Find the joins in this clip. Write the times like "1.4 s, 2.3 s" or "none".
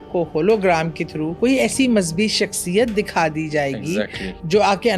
1.2 s